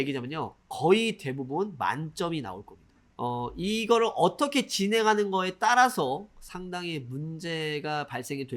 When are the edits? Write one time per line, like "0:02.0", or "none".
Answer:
0:03.1